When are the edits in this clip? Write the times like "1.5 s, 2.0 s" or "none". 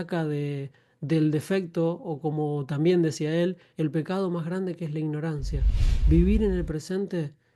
5.9 s